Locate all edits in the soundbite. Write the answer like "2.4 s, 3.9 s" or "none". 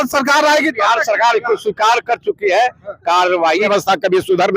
3.7 s